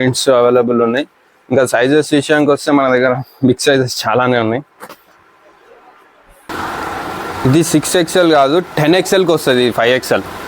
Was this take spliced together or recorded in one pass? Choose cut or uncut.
cut